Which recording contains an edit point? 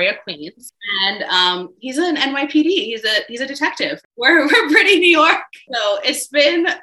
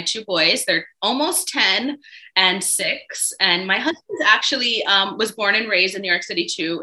first; 3 cuts; at 0.8 s, 4.0 s, 5.6 s

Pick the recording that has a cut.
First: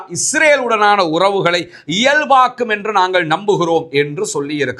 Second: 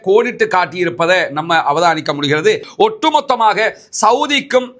second; 1 cut; at 2.7 s

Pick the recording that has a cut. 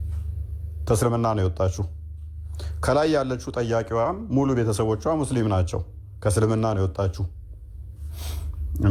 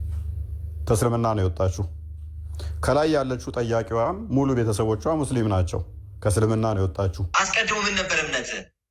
second; 1 cut; at 7.2 s

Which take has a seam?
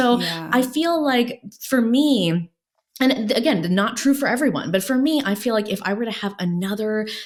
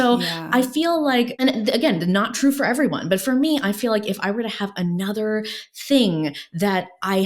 second; 1 cut; at 1.3 s

